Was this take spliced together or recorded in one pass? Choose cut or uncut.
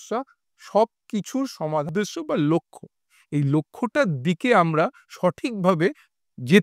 cut